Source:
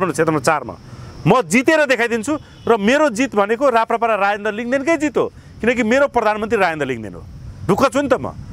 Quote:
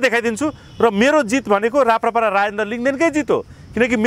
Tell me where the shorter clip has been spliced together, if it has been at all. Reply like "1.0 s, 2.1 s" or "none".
none